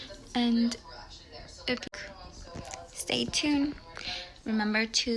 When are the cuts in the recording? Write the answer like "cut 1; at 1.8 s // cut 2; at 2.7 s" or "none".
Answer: cut 1; at 1.8 s